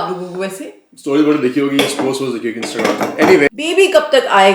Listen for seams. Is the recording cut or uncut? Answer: cut